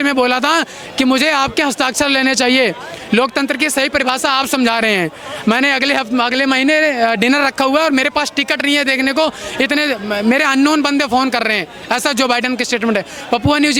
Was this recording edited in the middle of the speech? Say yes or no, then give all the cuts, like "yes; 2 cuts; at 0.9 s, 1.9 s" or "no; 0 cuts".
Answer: no; 0 cuts